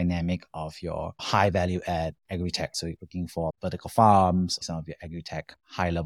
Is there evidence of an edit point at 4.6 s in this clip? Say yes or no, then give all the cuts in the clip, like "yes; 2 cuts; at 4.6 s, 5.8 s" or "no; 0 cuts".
yes; 1 cut; at 4.6 s